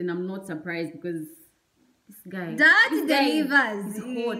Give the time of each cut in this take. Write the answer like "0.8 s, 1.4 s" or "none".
none